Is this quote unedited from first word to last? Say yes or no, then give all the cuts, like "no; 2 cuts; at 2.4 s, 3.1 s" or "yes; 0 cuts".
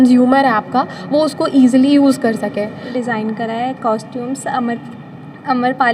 no; 1 cut; at 2.9 s